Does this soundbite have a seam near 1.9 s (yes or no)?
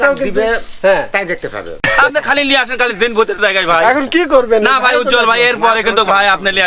yes